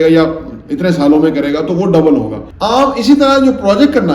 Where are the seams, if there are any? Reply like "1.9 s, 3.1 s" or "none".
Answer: 2.4 s